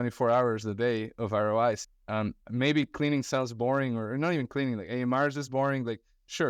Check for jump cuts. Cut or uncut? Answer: cut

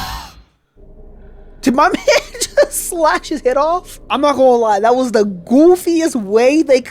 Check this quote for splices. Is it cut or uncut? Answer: cut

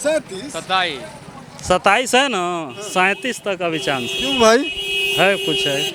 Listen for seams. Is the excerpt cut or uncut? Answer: uncut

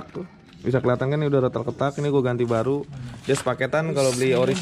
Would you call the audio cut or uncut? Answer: uncut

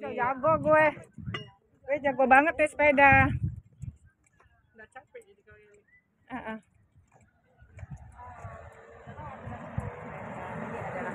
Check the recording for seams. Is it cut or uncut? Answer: uncut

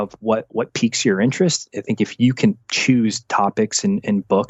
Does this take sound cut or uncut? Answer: uncut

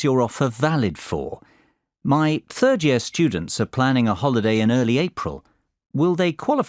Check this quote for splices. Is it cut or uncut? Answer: cut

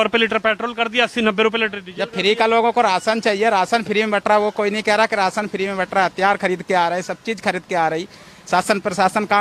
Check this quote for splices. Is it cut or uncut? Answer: uncut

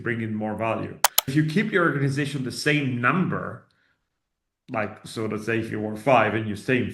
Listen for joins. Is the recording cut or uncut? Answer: cut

